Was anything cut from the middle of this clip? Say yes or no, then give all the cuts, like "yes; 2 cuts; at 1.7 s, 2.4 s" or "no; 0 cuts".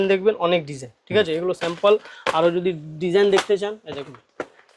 no; 0 cuts